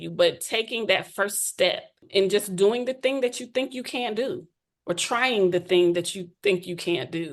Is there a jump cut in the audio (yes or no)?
yes